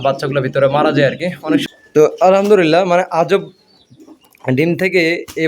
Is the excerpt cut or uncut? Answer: cut